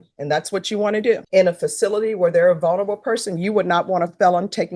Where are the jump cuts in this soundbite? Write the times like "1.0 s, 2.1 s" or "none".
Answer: 1.2 s